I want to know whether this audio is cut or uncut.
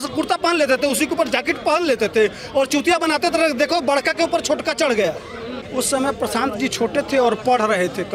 cut